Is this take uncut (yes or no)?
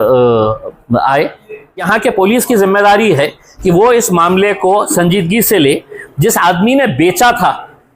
no